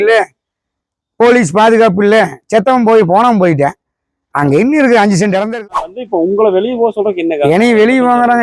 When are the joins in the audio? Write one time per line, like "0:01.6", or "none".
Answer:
0:05.5